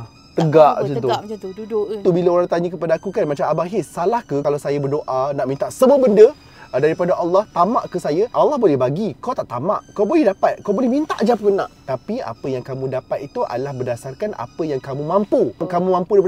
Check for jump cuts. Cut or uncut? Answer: cut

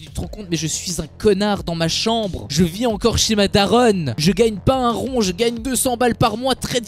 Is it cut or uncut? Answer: uncut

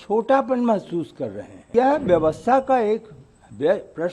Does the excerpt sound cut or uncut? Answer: cut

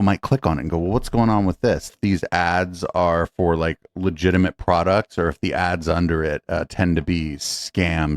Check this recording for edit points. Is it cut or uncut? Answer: cut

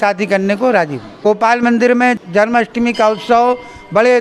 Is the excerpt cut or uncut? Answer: cut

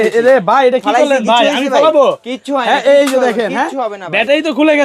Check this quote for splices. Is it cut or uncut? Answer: uncut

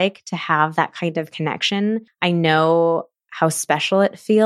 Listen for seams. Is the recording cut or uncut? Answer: cut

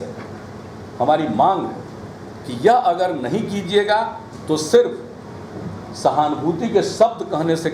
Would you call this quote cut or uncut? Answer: uncut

